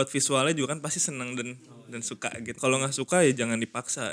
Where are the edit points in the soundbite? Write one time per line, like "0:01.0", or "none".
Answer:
0:02.6